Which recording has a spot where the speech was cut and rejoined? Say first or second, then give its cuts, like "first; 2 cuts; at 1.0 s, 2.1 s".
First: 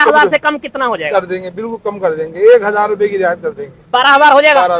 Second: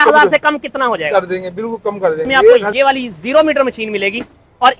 second; 1 cut; at 2.7 s